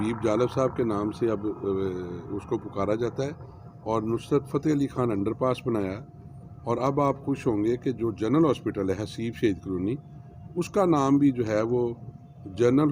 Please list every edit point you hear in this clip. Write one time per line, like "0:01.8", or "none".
none